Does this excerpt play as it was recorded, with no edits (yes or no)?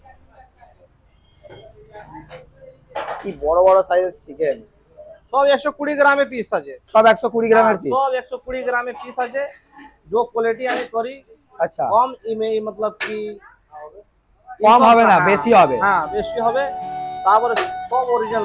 yes